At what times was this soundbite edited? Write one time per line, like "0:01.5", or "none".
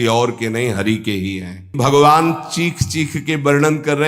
0:01.7